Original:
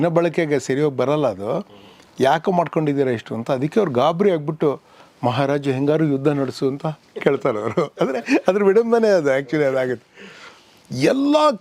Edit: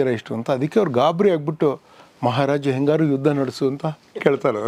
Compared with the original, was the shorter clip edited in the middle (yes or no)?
no